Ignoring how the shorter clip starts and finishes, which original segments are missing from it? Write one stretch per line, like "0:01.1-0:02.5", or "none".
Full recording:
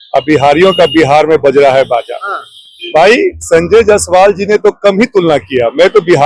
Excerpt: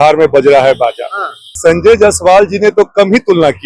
0:02.6-0:03.4